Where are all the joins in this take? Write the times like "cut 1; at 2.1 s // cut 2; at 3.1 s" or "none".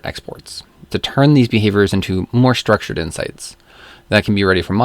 cut 1; at 0.9 s